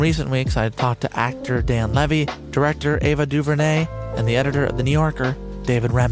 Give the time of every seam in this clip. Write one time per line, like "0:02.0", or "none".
none